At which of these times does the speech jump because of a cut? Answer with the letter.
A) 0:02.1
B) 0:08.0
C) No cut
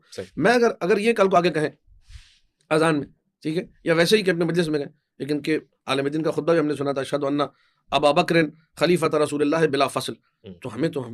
C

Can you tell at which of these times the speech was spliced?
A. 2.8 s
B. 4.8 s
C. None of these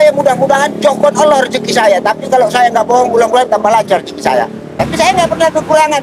B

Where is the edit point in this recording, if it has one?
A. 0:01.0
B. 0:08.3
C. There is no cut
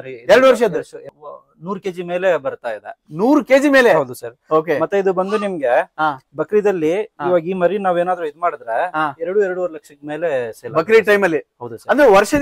A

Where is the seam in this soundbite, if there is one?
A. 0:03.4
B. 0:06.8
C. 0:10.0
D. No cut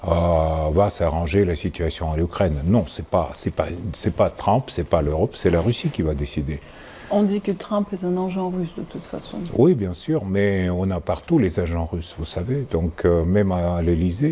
D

